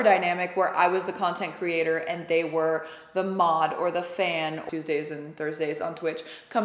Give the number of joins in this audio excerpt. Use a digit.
1